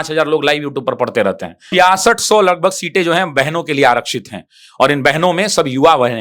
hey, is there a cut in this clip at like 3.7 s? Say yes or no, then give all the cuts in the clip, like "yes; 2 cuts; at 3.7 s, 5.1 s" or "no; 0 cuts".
no; 1 cut; at 1.6 s